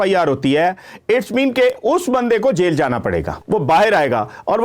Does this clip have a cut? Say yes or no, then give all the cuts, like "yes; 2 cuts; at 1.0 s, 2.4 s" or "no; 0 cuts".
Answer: yes; 1 cut; at 3.4 s